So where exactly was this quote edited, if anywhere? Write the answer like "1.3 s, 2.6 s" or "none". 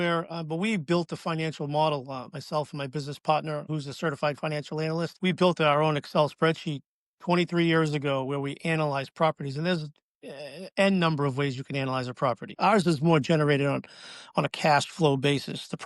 3.6 s, 5.1 s, 12.5 s

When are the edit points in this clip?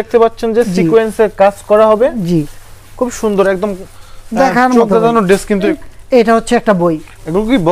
5.7 s

